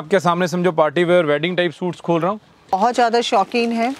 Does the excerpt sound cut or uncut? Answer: cut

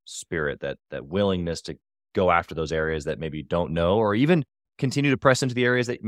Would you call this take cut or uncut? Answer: uncut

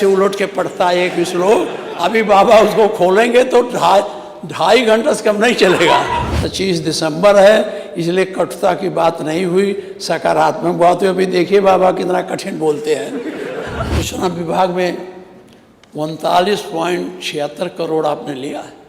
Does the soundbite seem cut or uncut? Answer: cut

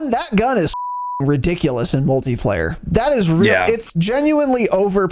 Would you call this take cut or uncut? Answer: uncut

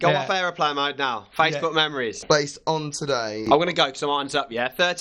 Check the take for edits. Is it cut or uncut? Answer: cut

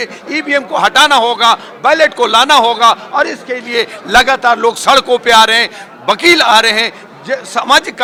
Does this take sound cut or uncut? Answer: uncut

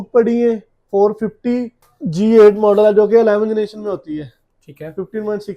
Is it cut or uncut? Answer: uncut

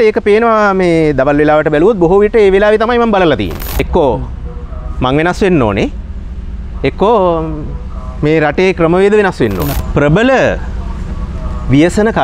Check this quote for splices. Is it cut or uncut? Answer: cut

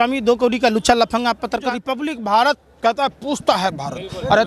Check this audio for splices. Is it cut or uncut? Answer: cut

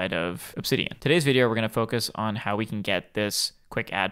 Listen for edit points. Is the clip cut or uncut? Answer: cut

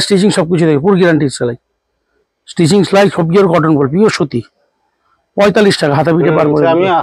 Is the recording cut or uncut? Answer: uncut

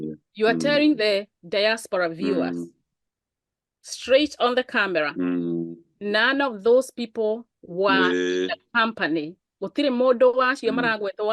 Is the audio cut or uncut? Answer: uncut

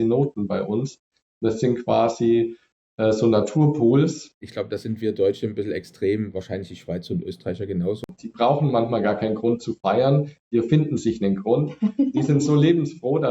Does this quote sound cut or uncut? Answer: cut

